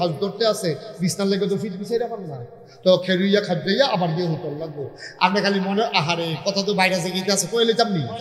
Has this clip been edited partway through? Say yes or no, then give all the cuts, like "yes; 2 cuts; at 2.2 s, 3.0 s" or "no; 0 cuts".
no; 0 cuts